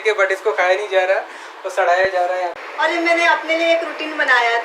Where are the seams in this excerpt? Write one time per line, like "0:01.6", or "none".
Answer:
0:02.6